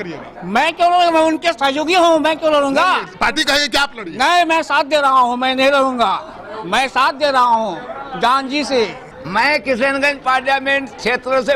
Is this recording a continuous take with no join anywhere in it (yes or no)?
no